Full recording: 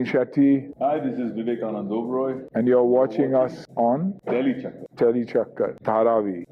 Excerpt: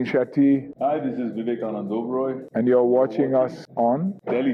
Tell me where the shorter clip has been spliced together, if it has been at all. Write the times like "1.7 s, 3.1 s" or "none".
none

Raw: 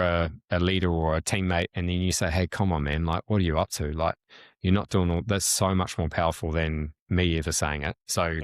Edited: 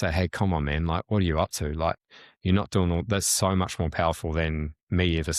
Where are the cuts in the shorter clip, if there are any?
none

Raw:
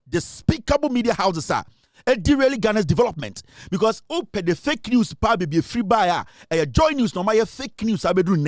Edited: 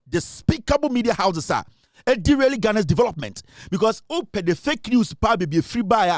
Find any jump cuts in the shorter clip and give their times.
none

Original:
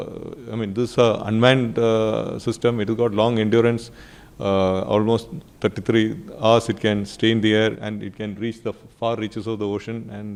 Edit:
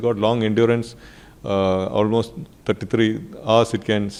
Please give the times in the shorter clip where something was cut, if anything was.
none

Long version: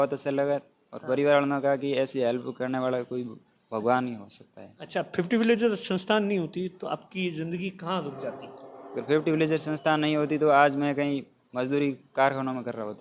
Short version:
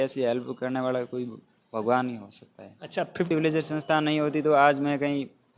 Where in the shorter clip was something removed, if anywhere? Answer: 3.3 s

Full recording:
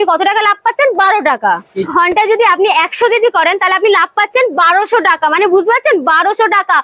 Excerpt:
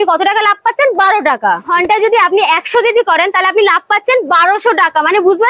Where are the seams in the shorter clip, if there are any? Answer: 1.7 s

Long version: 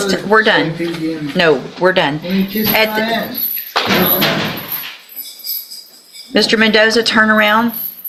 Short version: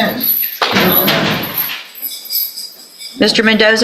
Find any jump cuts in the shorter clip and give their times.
none

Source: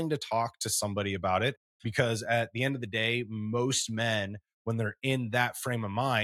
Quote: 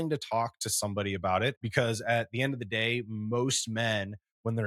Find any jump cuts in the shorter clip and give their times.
1.6 s

